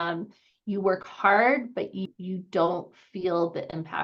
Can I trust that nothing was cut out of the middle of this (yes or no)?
no